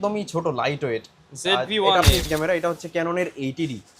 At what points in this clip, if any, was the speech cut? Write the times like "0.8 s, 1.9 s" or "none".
2.3 s

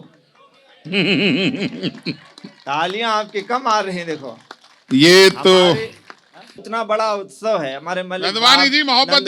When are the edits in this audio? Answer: 6.6 s

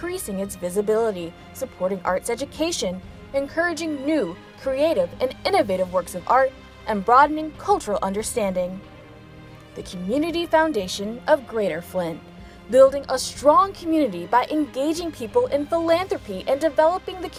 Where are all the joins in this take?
none

